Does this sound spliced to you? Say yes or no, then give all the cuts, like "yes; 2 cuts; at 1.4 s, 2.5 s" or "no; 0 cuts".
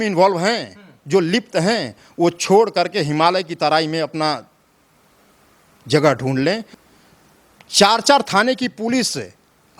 yes; 1 cut; at 6.7 s